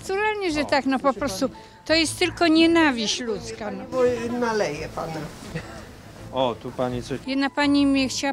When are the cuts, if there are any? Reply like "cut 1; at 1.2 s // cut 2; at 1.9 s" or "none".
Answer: none